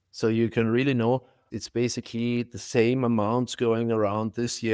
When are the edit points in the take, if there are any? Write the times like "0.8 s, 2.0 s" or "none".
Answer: 1.4 s